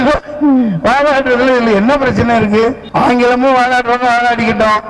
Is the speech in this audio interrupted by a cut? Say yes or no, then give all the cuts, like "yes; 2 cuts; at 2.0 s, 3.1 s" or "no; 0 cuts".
yes; 1 cut; at 2.8 s